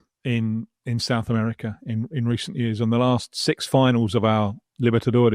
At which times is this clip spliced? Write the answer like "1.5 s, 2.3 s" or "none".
none